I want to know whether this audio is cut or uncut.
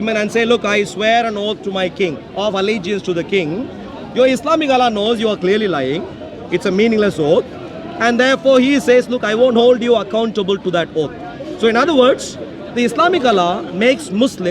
uncut